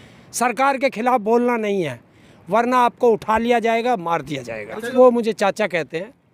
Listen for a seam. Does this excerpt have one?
yes; 1 cut; at 4.9 s

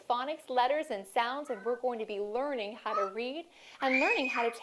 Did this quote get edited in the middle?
yes; 1 cut; at 1.9 s

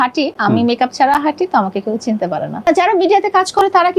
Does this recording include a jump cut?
yes; 1 cut; at 2.7 s

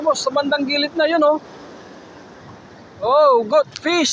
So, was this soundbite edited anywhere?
no; 0 cuts

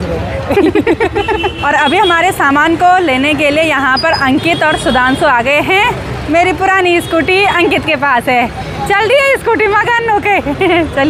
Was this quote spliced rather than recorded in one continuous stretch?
no; 0 cuts

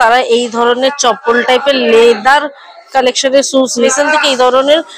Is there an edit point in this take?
yes; 1 cut; at 3.9 s

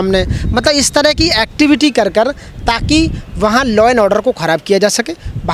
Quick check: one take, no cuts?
yes; 0 cuts

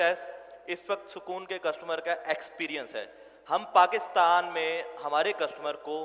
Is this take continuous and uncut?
yes; 0 cuts

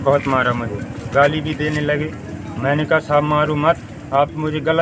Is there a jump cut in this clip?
no; 0 cuts

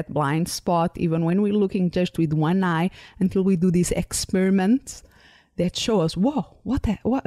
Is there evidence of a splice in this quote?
no; 0 cuts

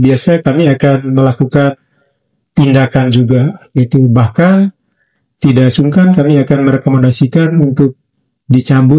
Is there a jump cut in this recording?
no; 0 cuts

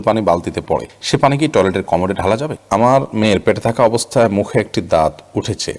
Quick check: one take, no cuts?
no; 1 cut; at 2.6 s

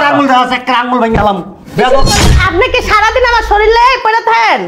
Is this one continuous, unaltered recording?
no; 1 cut; at 2.2 s

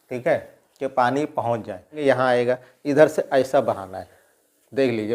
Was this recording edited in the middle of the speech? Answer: yes; 1 cut; at 2.0 s

